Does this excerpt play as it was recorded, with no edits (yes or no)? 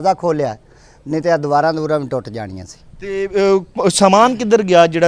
yes